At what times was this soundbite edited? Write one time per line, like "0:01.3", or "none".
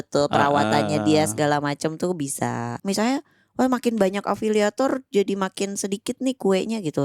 0:02.7